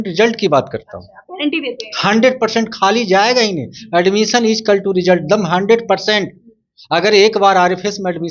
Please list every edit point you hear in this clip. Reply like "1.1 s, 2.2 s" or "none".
none